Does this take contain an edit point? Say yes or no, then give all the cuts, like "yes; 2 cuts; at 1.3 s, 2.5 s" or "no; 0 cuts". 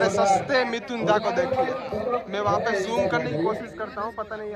no; 0 cuts